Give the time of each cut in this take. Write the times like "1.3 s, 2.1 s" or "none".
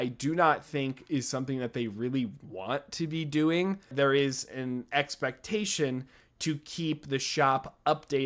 3.9 s